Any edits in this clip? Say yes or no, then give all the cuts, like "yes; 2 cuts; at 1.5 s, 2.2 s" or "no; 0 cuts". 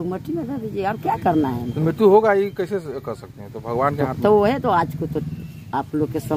no; 0 cuts